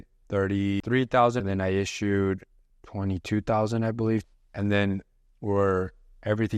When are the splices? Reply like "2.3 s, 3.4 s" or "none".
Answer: 0.8 s, 1.4 s, 4.3 s